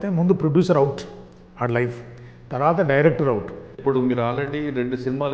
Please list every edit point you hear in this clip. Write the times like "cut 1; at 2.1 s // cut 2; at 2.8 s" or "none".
cut 1; at 3.8 s